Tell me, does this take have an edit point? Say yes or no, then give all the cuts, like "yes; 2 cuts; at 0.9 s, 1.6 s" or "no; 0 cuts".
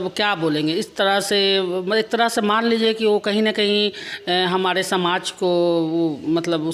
no; 0 cuts